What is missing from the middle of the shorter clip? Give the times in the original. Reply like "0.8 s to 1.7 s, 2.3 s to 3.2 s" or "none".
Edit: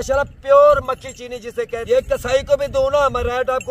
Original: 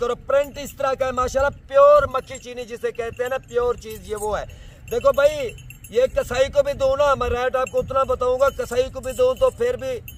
3.0 s to 5.8 s